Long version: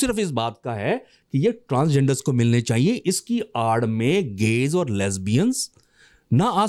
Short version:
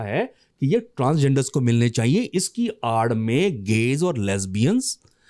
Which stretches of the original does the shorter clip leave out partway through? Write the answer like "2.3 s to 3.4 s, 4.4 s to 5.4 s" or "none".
none